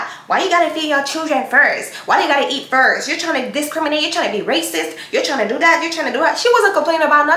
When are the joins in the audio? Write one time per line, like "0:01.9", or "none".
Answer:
none